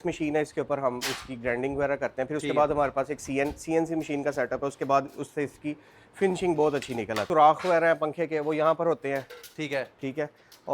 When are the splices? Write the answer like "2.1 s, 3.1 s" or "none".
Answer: 7.2 s